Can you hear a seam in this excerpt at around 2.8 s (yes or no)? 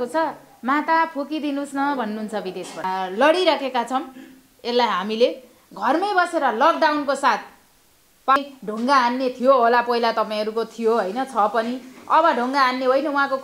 yes